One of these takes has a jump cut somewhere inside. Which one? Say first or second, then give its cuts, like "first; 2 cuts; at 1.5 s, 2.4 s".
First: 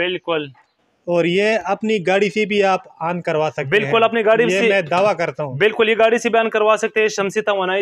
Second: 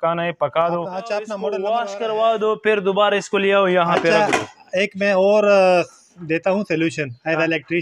second; 1 cut; at 1.4 s